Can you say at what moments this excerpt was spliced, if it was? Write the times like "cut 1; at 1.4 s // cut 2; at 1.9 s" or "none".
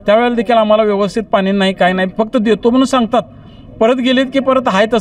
none